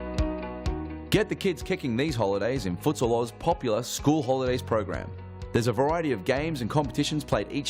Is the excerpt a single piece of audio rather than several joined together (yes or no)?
no